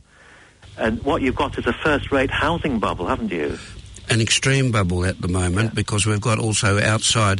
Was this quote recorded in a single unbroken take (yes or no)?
yes